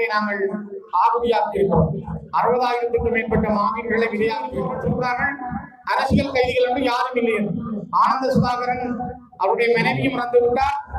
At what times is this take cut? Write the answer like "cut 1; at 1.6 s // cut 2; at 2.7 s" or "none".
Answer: cut 1; at 4.6 s

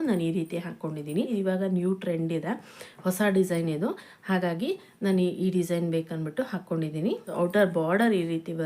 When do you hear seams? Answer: cut 1; at 1.3 s // cut 2; at 7.3 s

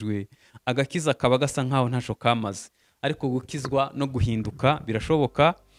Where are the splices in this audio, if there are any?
none

